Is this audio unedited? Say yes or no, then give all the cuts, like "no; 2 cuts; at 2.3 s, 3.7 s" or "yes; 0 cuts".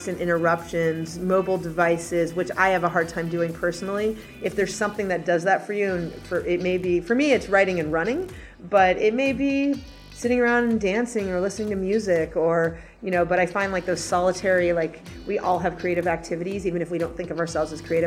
yes; 0 cuts